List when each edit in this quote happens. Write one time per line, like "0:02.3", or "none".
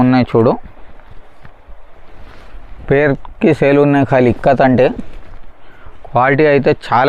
none